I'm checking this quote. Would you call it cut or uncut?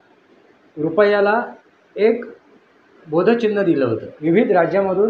cut